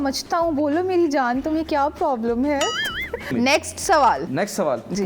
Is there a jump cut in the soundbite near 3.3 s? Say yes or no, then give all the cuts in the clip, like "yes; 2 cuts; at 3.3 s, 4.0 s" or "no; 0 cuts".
yes; 2 cuts; at 3.3 s, 4.3 s